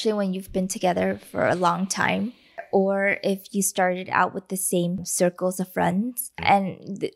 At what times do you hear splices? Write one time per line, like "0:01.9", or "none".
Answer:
0:02.6
0:05.1
0:06.4

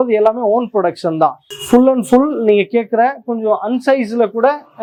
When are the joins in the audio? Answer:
none

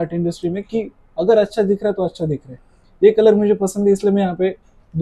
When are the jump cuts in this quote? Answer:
none

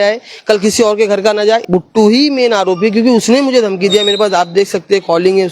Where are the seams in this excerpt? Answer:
0:01.6

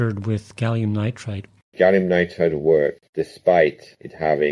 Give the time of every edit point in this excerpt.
0:01.7
0:03.1

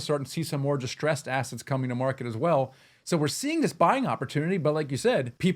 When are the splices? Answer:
none

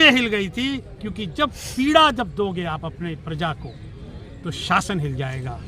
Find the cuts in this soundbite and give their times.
none

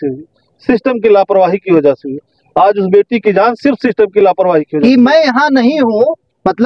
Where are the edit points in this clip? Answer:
0:04.7

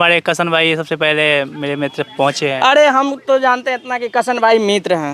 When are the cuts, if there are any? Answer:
none

